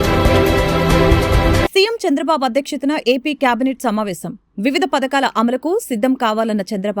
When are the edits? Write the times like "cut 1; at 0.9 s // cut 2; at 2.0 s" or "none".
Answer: cut 1; at 1.5 s